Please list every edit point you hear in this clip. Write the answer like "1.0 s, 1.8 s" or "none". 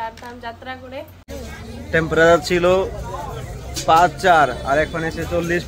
1.3 s